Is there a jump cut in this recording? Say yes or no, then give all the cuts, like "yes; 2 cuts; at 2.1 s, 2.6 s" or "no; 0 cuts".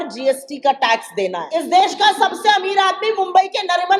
yes; 1 cut; at 1.4 s